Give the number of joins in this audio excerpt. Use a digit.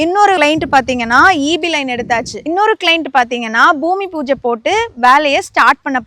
0